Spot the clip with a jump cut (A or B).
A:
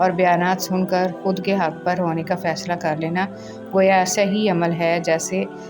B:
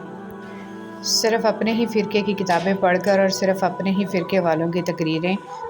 B